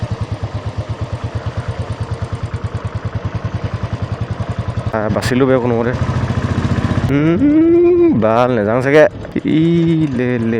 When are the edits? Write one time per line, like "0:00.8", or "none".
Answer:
0:04.9
0:07.1
0:09.4

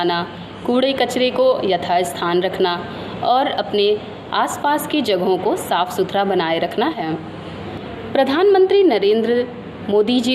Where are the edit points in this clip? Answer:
0:07.0

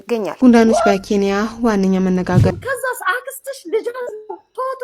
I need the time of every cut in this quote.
0:02.5

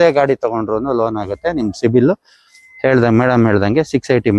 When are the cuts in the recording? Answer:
none

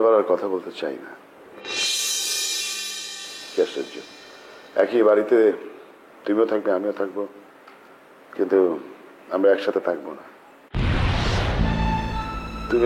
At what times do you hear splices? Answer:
none

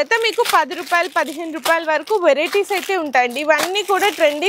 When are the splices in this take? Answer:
none

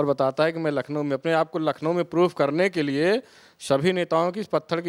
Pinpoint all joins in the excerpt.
none

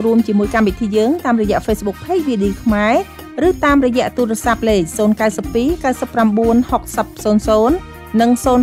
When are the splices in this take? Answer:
none

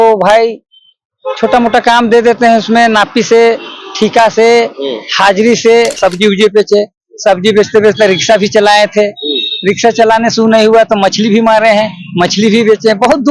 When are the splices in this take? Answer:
0:06.0

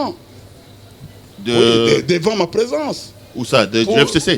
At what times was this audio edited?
none

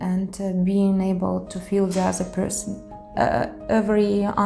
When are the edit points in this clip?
0:03.1

